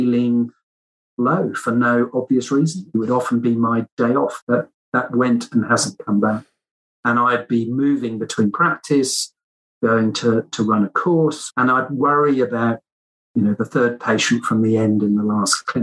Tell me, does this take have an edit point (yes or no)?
yes